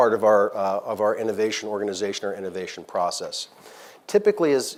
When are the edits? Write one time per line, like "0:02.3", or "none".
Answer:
none